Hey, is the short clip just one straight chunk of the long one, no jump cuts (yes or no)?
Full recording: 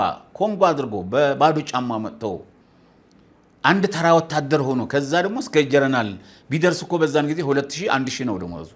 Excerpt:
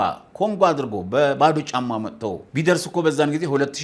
no